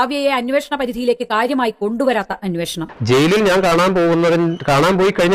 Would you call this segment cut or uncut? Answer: cut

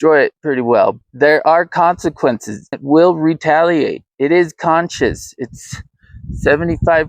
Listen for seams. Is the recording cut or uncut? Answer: cut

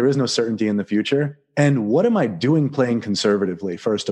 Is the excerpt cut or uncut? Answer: cut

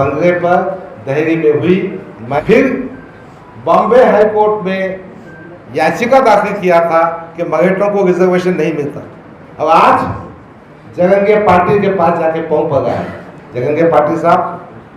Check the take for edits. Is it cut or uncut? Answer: cut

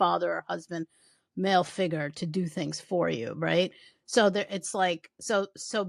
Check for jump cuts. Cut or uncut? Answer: uncut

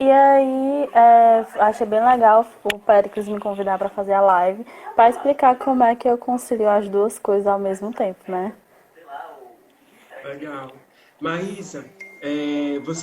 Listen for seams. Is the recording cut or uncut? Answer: cut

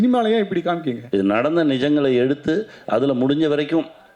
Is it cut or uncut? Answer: cut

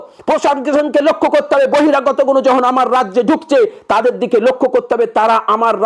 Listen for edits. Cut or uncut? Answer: uncut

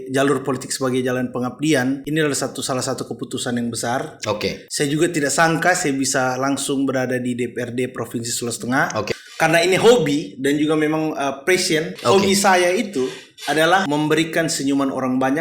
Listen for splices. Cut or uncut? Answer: cut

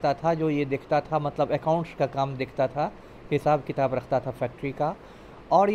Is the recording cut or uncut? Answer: uncut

